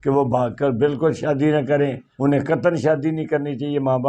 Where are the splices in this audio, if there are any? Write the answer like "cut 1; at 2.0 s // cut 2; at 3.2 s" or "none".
cut 1; at 2.0 s